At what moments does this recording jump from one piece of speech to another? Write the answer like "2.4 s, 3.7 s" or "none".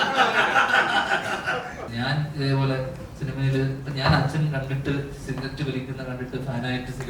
1.9 s